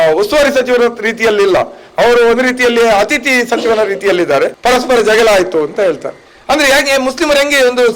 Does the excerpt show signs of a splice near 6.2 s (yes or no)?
no